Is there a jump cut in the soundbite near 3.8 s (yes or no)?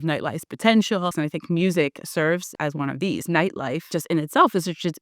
yes